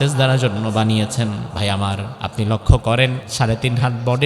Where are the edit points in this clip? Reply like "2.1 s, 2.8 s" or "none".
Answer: 1.5 s, 2.1 s, 3.2 s